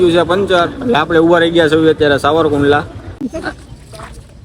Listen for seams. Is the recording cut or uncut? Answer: cut